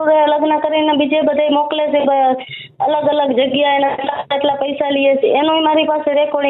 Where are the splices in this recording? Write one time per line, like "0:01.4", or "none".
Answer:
none